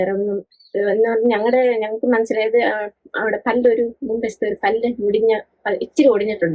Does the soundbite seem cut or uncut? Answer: uncut